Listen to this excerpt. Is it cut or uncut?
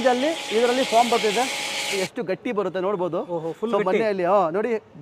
cut